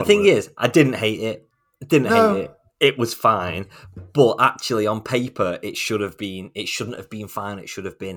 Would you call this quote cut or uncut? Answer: uncut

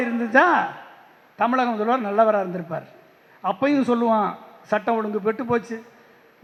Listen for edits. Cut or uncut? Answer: uncut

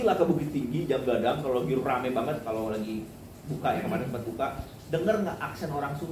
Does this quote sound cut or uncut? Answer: uncut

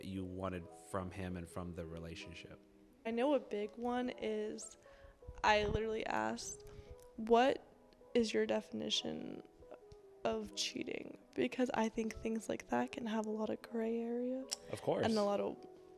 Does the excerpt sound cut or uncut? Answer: cut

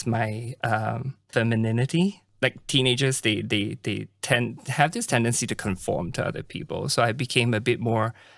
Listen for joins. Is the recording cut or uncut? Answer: cut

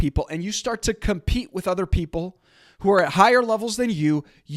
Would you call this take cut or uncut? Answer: uncut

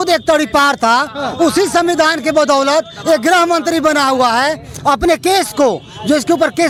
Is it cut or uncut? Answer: uncut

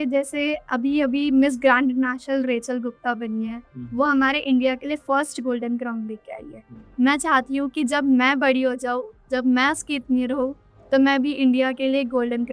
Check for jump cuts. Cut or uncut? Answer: uncut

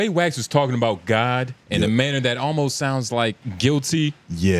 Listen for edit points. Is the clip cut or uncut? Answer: cut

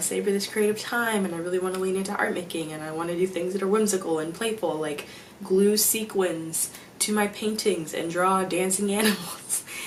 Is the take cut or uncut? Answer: uncut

